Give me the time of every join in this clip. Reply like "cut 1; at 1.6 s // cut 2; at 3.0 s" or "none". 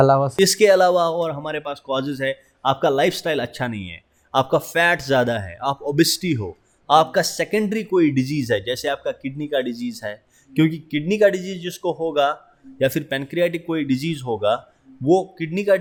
none